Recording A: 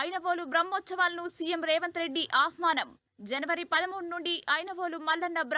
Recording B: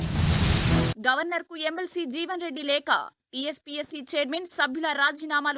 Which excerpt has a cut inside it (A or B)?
B